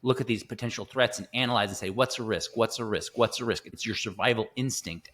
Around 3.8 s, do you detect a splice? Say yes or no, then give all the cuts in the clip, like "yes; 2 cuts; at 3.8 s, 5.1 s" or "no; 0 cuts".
yes; 1 cut; at 3.8 s